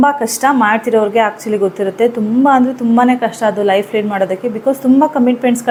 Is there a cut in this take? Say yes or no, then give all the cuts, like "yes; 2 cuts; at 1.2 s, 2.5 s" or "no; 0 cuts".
no; 0 cuts